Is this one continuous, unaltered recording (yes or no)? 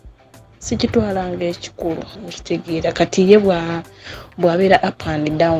no